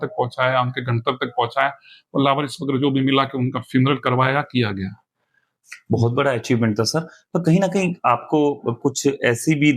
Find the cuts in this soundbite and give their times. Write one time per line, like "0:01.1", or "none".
none